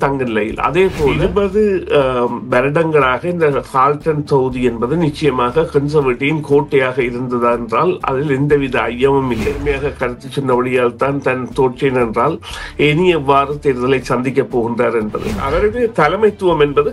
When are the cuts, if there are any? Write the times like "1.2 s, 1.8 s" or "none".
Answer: 1.2 s, 9.6 s, 15.5 s